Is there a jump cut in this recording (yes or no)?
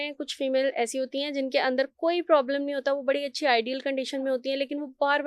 no